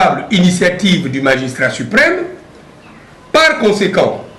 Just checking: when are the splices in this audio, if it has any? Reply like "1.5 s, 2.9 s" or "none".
none